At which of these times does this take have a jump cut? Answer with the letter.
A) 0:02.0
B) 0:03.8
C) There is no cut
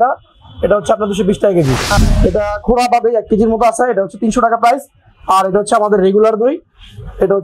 A